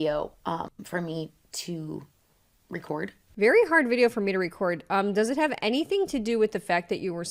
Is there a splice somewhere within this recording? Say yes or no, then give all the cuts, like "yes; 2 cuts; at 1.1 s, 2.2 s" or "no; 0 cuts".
no; 0 cuts